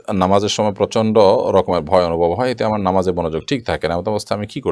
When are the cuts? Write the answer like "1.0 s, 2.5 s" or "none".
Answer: none